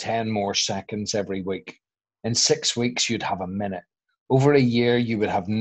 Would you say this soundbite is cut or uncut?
uncut